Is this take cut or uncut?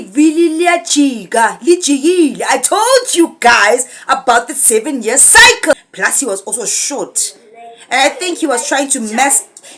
cut